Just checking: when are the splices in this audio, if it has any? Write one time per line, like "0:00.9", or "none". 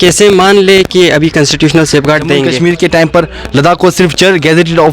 0:02.5